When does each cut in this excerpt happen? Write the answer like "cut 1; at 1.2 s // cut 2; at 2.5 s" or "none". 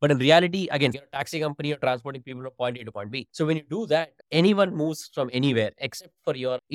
cut 1; at 0.9 s